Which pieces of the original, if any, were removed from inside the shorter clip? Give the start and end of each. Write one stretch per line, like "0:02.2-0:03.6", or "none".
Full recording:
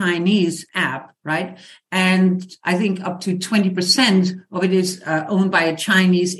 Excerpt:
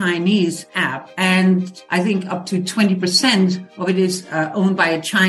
0:01.0-0:01.8